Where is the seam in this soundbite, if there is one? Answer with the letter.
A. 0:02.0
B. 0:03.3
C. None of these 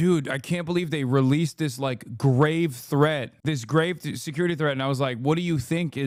C